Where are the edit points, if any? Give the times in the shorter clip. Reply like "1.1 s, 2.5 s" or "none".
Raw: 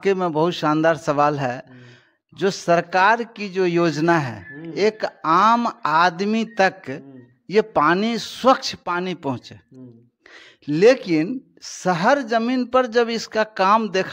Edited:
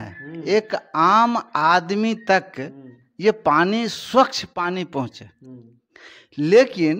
none